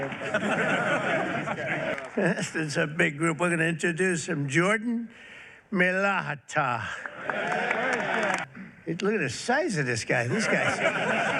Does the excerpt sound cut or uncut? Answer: cut